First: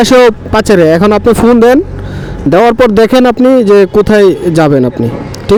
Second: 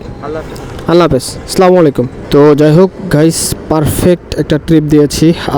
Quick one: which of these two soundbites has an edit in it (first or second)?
second